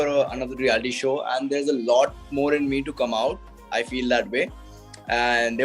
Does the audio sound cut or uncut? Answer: uncut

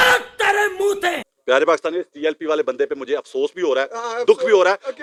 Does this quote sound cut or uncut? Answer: uncut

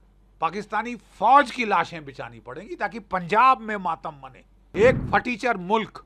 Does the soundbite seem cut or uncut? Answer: cut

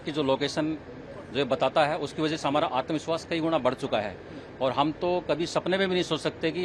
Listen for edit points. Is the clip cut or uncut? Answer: uncut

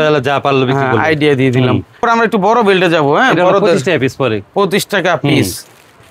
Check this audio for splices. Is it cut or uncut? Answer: uncut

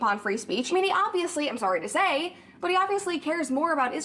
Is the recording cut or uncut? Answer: uncut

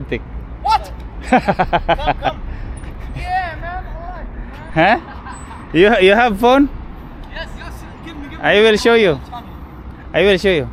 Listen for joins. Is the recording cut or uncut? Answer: uncut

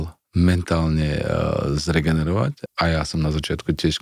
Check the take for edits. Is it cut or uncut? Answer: cut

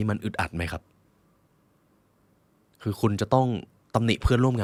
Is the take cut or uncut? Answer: uncut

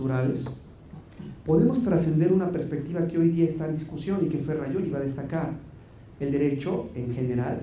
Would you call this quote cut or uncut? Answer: uncut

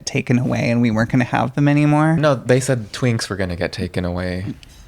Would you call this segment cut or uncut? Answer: cut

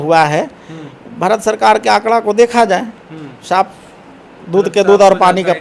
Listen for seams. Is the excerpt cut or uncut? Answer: uncut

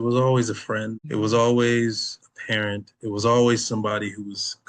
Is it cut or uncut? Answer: cut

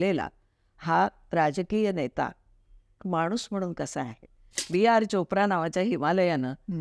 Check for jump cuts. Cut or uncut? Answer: cut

